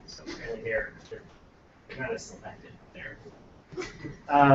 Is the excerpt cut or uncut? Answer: cut